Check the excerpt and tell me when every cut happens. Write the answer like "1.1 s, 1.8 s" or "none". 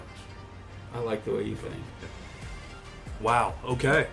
2.8 s